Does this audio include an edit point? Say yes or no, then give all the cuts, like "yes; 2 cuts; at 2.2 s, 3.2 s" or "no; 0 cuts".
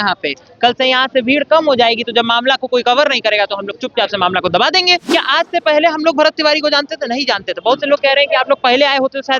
yes; 1 cut; at 5.0 s